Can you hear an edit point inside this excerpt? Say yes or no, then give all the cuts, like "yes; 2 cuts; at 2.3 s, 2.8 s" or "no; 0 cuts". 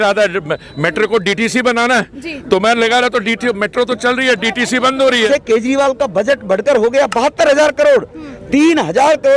yes; 1 cut; at 5.3 s